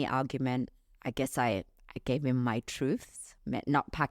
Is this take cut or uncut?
uncut